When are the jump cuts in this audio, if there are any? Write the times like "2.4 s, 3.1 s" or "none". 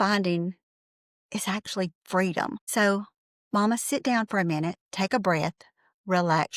none